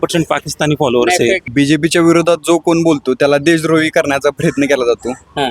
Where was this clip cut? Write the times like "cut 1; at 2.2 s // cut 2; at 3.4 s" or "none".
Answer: cut 1; at 1.4 s